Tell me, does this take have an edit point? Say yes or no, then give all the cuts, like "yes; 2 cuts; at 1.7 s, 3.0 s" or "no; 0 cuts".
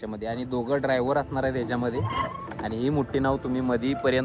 no; 0 cuts